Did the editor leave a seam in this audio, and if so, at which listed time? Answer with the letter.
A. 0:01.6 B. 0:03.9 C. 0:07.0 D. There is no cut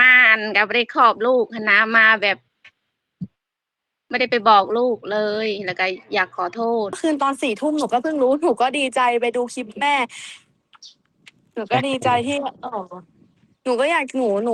C